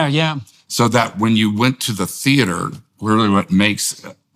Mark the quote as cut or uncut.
uncut